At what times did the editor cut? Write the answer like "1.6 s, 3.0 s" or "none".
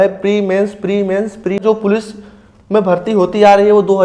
1.6 s